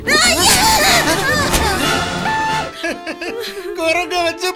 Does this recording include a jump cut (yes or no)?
yes